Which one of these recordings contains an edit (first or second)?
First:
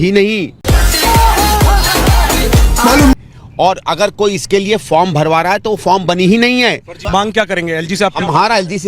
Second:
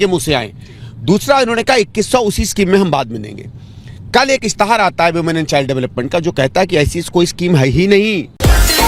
first